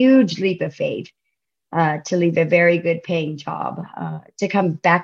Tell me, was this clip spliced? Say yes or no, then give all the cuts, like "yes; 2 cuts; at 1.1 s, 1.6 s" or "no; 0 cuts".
no; 0 cuts